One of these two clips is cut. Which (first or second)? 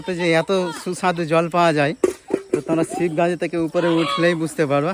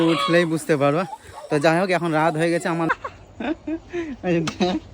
second